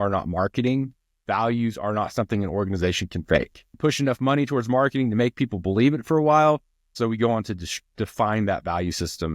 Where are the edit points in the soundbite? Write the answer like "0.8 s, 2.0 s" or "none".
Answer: 3.6 s, 6.9 s

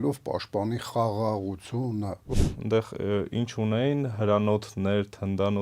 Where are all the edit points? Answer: 2.4 s

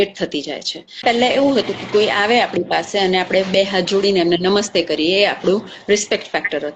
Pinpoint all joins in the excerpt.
1.0 s

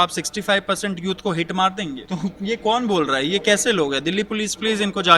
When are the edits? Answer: 2.0 s

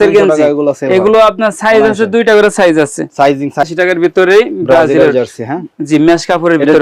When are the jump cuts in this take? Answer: 3.6 s

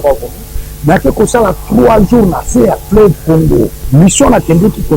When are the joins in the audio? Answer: 3.8 s

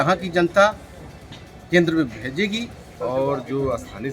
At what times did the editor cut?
2.7 s

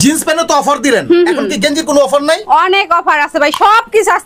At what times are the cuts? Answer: none

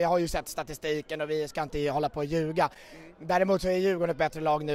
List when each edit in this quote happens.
none

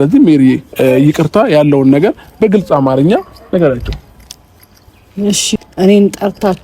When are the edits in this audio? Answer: 5.6 s

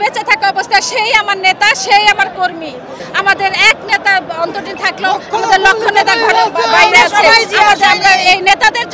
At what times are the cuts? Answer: 3.0 s

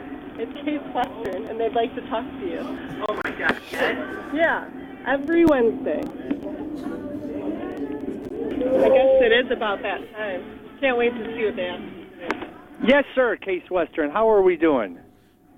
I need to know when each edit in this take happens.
8.5 s

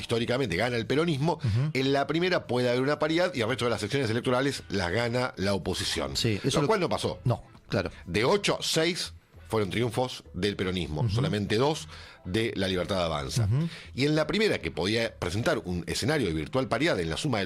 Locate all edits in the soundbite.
none

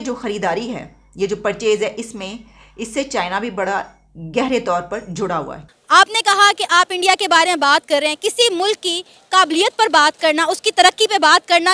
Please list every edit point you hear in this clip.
5.7 s

